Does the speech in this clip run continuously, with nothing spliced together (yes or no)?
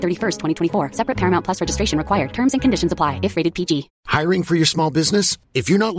no